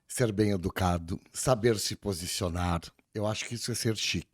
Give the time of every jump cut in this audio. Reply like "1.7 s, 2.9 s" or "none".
1.3 s, 3.0 s

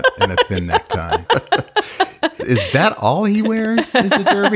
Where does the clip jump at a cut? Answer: 1.2 s, 2.4 s

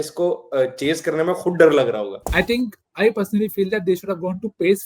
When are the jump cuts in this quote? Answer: 2.3 s

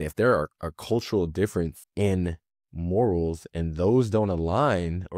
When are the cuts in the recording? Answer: 1.8 s

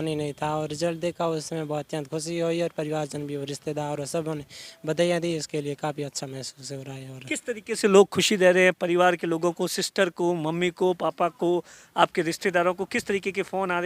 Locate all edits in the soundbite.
none

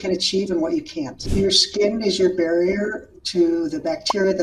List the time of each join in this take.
1.3 s

